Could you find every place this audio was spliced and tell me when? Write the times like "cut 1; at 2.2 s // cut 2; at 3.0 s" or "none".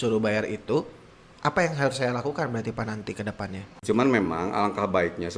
cut 1; at 3.7 s